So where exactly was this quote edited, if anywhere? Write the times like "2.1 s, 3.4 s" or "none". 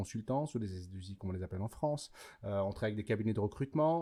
none